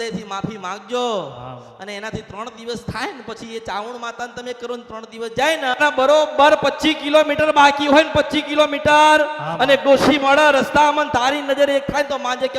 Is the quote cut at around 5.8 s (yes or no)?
yes